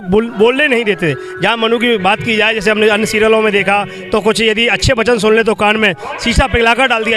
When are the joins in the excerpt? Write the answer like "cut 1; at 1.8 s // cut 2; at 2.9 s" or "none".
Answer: none